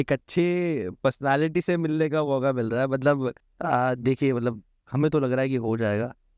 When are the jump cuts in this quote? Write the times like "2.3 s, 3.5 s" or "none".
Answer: 3.5 s